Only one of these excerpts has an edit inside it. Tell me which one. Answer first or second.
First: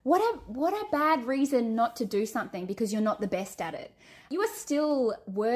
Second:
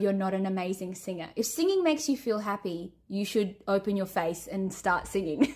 first